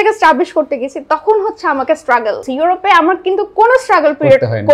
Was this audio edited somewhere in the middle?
yes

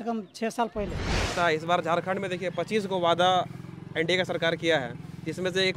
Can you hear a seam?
yes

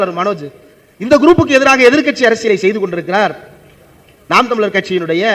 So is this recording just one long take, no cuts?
yes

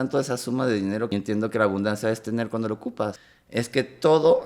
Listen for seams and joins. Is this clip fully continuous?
no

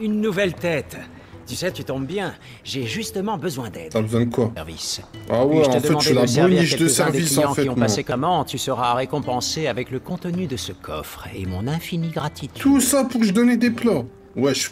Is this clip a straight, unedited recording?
no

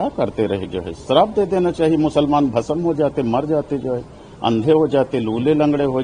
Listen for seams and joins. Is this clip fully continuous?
yes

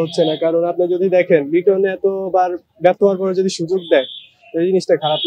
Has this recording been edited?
no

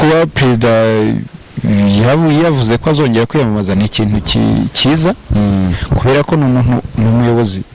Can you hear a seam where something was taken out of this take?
no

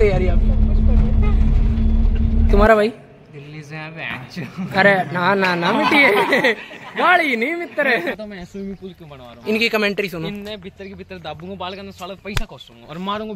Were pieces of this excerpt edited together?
yes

